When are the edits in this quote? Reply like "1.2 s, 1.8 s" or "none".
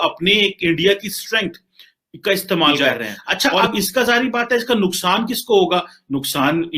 2.7 s